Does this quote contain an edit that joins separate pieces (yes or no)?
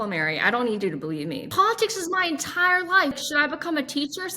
yes